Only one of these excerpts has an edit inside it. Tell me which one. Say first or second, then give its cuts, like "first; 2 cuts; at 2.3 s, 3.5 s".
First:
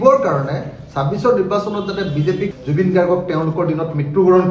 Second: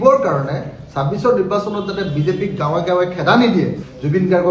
first; 1 cut; at 2.5 s